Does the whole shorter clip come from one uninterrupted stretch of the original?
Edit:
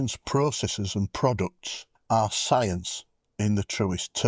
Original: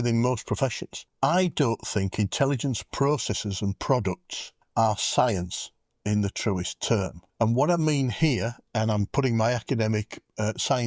yes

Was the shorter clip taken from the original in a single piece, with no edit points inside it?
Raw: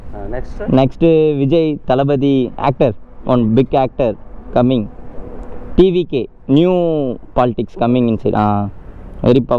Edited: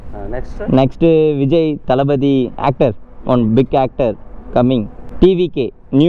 no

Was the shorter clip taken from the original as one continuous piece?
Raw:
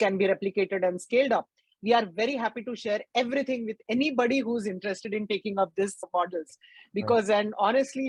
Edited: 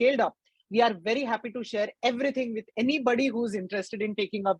yes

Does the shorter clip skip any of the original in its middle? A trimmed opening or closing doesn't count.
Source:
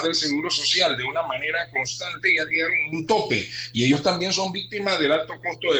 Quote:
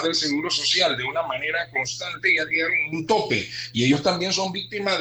no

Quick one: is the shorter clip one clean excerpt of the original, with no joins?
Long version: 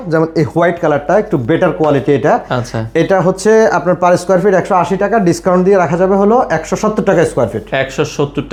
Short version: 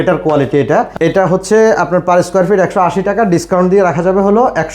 no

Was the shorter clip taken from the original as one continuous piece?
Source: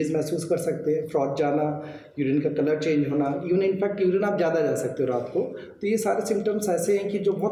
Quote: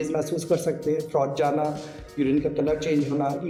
yes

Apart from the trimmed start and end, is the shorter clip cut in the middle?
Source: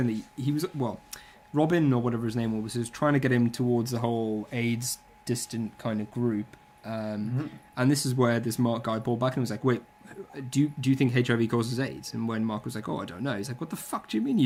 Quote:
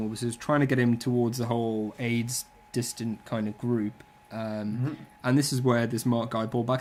no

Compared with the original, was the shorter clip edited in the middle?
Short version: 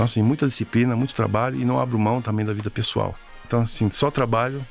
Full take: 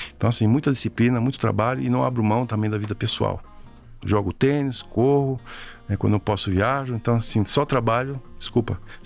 yes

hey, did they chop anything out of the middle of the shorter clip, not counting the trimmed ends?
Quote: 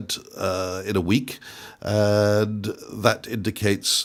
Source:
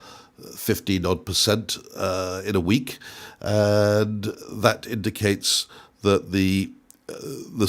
no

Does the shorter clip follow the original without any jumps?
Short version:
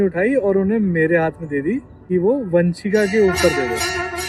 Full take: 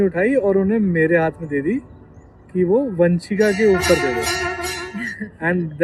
no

